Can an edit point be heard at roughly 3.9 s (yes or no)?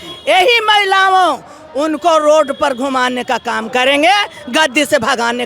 no